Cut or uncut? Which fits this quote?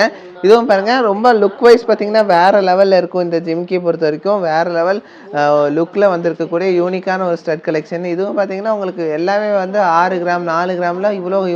uncut